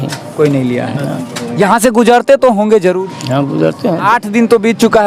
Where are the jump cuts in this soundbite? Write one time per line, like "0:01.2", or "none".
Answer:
0:04.0